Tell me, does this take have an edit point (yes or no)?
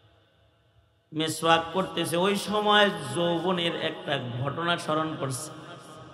no